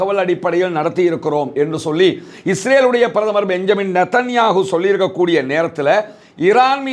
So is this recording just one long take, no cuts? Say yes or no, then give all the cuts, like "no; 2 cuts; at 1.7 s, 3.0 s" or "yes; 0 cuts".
yes; 0 cuts